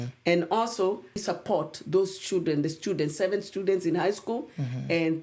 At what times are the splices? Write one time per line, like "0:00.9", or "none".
0:01.2